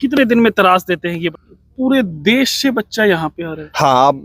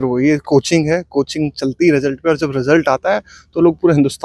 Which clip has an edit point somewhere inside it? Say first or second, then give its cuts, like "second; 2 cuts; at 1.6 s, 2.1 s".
first; 1 cut; at 1.3 s